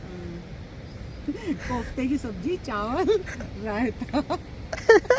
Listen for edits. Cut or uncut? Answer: uncut